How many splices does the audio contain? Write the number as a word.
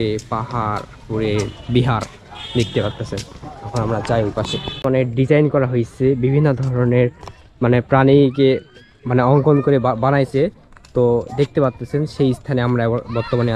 one